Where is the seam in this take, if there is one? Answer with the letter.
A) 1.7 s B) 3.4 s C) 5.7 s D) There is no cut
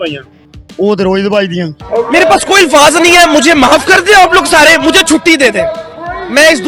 D